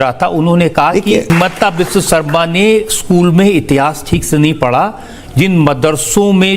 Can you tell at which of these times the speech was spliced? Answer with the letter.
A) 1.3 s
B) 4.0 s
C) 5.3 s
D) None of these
A